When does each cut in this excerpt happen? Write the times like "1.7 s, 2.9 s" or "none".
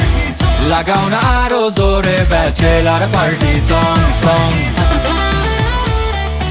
none